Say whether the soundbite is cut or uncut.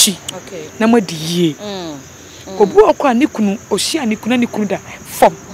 uncut